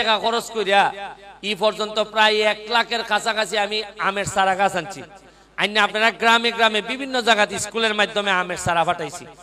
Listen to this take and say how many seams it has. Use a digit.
0